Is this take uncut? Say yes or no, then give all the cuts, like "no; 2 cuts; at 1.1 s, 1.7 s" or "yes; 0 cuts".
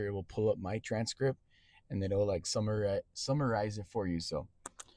yes; 0 cuts